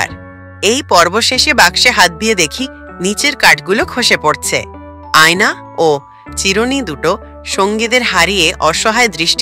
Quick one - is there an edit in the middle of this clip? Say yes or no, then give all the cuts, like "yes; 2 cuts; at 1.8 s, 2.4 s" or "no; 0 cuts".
no; 0 cuts